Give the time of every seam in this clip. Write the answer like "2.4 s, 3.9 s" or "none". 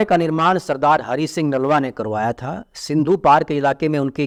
none